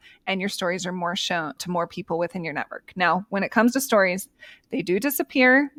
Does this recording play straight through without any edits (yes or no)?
yes